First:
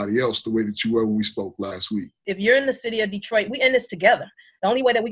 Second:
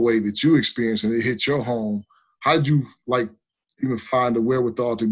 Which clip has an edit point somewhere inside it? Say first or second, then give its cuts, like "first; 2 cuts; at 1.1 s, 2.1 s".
first; 1 cut; at 2.2 s